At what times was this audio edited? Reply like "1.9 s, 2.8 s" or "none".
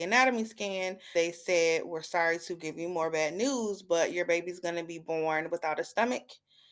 1.1 s